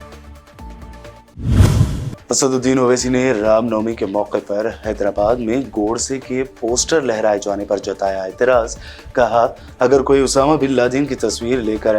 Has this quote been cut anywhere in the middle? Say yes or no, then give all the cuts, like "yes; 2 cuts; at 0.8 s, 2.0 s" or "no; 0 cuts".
yes; 1 cut; at 1.0 s